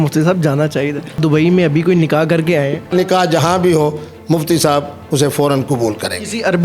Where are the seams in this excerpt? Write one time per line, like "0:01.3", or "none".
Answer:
0:01.2
0:02.9